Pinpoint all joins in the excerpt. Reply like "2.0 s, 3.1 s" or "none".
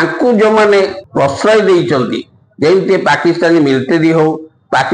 1.0 s